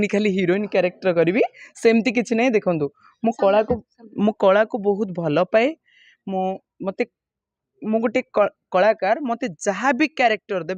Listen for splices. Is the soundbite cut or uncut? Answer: uncut